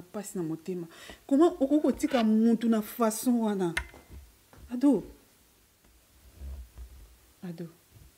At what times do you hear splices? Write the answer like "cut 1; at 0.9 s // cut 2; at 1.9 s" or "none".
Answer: cut 1; at 5.8 s